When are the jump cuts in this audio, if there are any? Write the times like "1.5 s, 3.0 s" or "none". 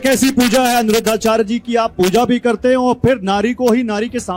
none